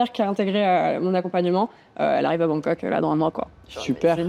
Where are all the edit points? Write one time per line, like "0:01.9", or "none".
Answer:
none